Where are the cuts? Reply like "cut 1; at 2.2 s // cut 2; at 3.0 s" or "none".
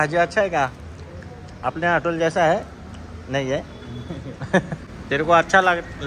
cut 1; at 4.9 s